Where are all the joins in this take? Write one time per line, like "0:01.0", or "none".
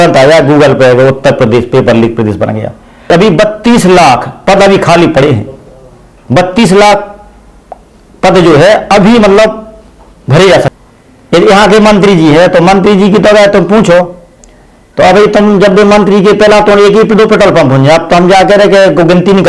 0:03.1
0:10.8